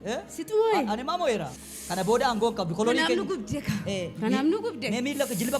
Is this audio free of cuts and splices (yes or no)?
no